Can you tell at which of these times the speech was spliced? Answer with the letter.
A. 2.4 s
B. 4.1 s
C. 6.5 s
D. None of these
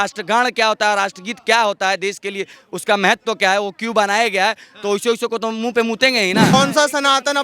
C